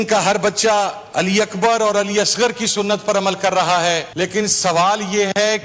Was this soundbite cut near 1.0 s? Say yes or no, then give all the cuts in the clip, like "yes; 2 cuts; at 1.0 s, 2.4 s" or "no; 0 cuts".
yes; 2 cuts; at 1.0 s, 4.1 s